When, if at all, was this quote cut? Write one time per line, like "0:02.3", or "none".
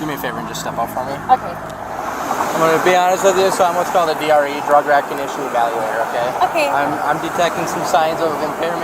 0:02.1